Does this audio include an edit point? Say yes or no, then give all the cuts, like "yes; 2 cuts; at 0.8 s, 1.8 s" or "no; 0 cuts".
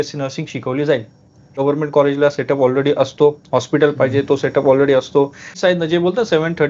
yes; 2 cuts; at 1.5 s, 5.5 s